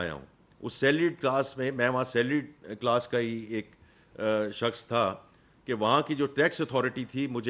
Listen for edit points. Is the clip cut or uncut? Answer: uncut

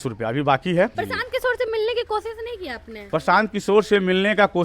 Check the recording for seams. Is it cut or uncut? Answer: cut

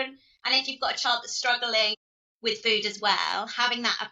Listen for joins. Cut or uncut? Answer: uncut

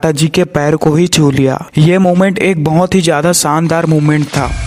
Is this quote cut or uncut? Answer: uncut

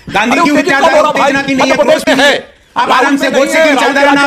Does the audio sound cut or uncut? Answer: uncut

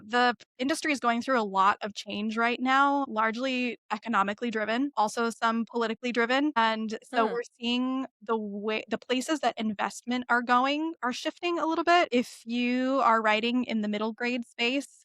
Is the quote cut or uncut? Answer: cut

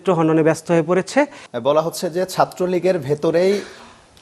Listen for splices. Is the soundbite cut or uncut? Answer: cut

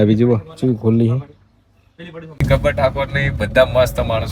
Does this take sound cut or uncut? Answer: cut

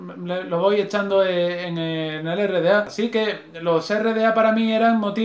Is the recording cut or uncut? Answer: cut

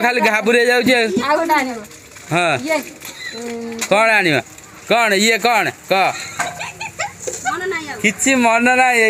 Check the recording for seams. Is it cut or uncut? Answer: uncut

